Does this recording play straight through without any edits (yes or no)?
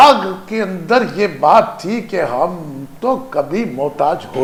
yes